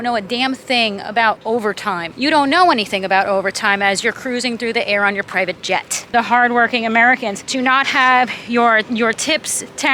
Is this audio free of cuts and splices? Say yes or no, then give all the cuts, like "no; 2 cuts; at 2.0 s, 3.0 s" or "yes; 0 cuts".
no; 3 cuts; at 1.6 s, 6.1 s, 7.4 s